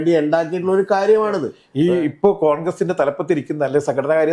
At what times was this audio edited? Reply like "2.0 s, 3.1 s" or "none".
1.6 s

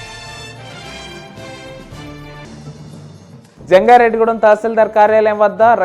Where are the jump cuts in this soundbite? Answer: 2.5 s, 3.3 s

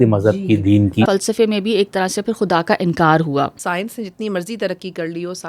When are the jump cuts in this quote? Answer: 1.1 s, 3.6 s

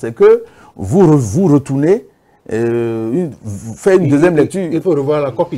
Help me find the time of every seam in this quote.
none

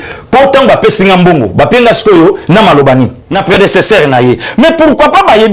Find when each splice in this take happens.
3.3 s

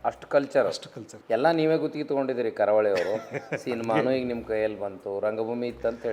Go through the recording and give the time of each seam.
1.1 s

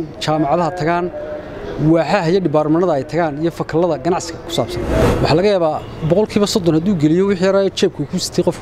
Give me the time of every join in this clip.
5.0 s

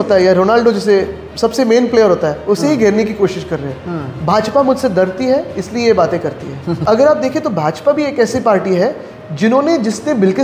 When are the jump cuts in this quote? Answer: 6.8 s

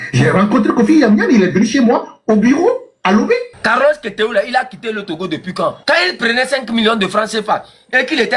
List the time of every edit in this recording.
3.6 s

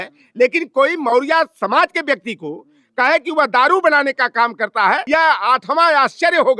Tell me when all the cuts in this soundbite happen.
5.0 s

